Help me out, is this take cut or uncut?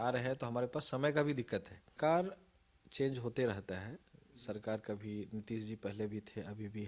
cut